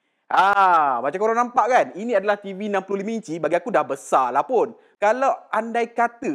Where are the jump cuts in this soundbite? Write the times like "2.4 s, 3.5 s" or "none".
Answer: 4.8 s